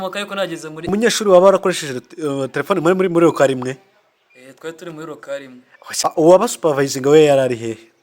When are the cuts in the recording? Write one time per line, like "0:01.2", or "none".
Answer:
0:01.2
0:06.0

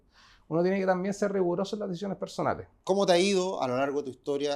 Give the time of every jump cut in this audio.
0:02.7

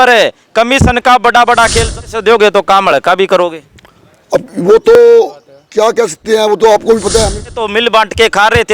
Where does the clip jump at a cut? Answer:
0:01.9
0:07.5

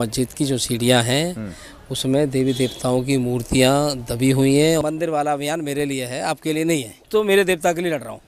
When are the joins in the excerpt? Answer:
0:04.8
0:07.0

